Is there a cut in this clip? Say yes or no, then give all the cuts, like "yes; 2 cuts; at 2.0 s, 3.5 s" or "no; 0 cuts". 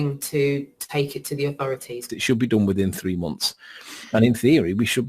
yes; 1 cut; at 2.0 s